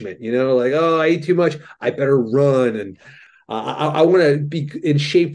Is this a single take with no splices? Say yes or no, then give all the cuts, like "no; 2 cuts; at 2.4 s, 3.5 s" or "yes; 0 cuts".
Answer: no; 1 cut; at 3.2 s